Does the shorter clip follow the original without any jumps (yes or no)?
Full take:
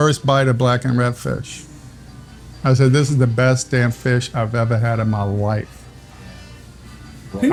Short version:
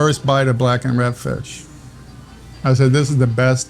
yes